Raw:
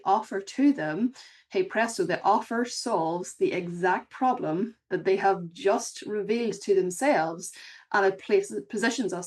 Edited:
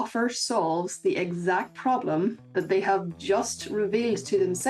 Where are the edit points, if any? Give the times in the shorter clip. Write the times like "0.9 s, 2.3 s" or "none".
none